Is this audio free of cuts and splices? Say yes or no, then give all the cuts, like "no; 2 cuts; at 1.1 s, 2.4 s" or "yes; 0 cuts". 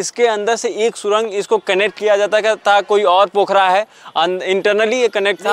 yes; 0 cuts